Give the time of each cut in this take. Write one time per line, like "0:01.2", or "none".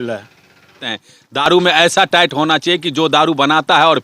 0:00.9